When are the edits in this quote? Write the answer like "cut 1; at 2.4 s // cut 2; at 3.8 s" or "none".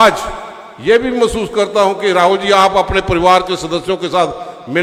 none